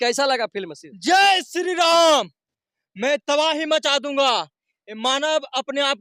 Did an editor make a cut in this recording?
no; 0 cuts

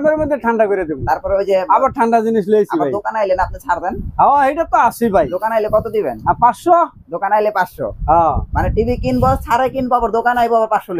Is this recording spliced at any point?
no; 0 cuts

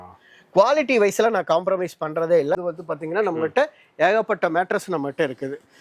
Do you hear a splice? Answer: yes; 1 cut; at 2.6 s

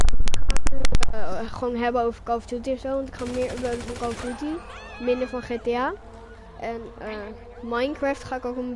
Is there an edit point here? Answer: yes; 1 cut; at 3.8 s

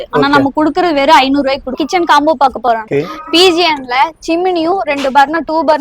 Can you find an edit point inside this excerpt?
yes; 1 cut; at 1.7 s

